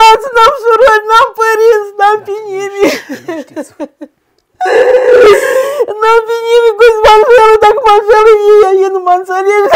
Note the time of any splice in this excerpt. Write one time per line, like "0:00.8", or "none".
none